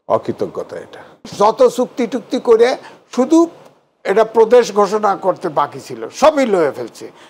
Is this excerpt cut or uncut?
cut